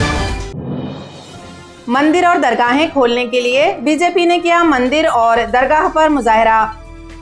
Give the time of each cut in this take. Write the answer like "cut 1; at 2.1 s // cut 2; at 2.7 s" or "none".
cut 1; at 1.6 s